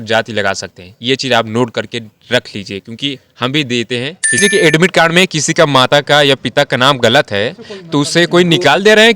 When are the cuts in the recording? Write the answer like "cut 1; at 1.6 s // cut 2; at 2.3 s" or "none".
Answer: cut 1; at 4.4 s